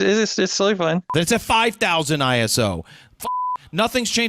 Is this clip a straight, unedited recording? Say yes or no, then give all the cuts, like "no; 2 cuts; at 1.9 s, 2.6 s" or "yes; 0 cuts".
no; 1 cut; at 1.1 s